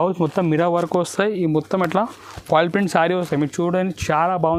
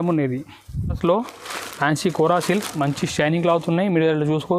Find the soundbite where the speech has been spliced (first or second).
second